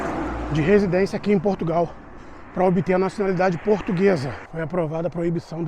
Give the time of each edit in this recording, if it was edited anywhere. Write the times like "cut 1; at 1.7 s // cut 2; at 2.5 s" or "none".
cut 1; at 4.4 s